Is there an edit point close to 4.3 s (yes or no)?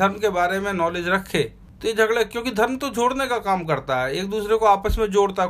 no